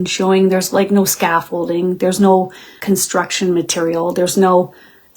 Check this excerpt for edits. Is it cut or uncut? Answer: cut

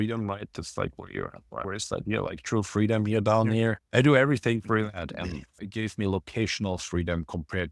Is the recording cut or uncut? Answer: cut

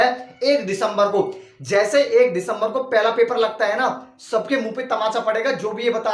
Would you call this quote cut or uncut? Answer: uncut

